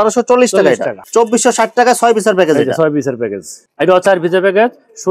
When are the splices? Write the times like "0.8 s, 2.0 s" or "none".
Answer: 1.0 s, 3.7 s